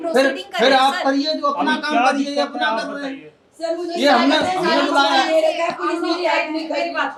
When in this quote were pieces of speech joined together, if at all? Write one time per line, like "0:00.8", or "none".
none